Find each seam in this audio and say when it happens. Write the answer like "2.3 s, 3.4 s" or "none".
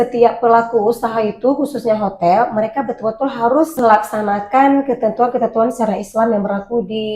3.7 s